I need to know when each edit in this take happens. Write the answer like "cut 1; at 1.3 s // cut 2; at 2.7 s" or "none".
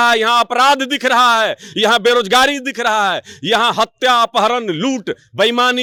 none

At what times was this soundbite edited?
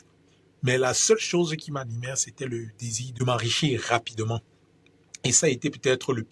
cut 1; at 3.0 s

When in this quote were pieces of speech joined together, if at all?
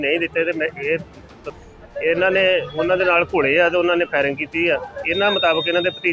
cut 1; at 1.4 s

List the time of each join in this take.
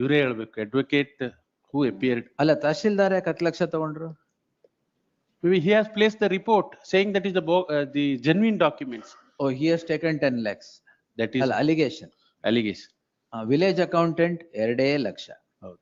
none

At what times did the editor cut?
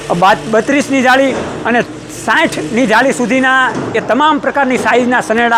none

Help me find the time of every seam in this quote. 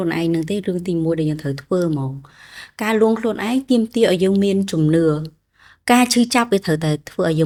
none

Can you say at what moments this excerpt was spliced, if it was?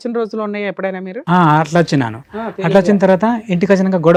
none

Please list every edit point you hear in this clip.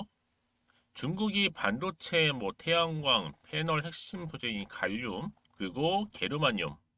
cut 1; at 5.4 s

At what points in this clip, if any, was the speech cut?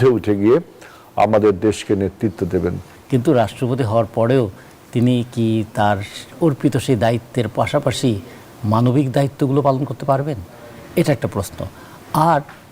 cut 1; at 2.9 s

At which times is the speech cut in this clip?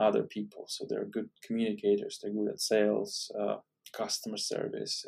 none

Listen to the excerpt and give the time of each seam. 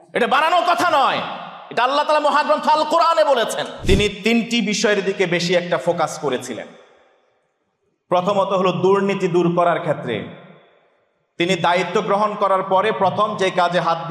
cut 1; at 3.7 s

